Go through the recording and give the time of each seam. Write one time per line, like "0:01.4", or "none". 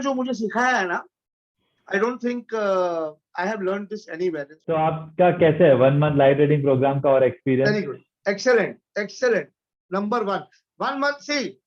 0:04.5